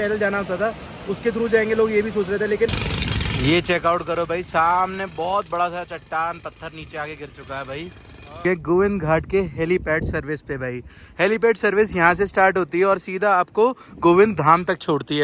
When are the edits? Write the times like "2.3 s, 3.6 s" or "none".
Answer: 2.7 s, 8.4 s